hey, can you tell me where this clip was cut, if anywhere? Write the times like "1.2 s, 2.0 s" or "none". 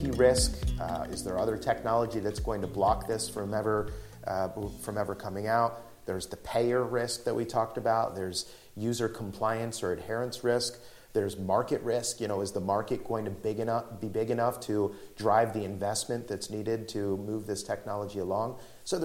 none